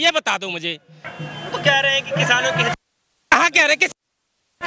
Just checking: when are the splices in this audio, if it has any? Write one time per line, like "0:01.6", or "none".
none